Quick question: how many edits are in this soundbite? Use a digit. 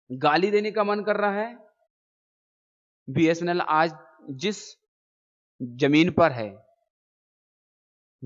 0